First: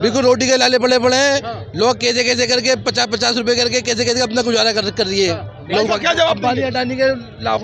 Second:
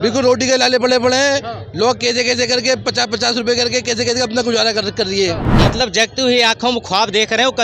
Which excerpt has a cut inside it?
second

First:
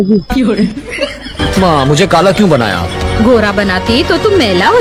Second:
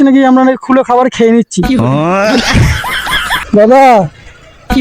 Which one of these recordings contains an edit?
second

